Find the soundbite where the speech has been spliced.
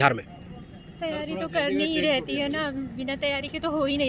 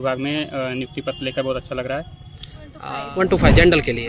second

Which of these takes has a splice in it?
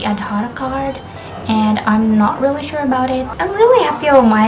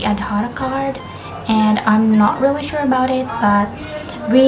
first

